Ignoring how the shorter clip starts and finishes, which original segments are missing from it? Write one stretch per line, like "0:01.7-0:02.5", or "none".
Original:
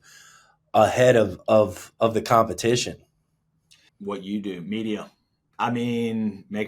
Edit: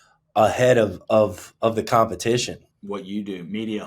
0:03.1-0:03.9